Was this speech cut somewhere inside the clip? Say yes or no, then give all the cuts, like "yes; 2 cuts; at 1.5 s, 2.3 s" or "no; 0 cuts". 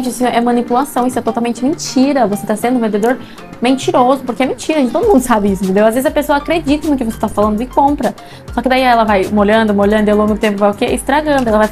no; 0 cuts